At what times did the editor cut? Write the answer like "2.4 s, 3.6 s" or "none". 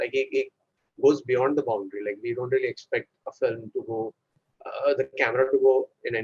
none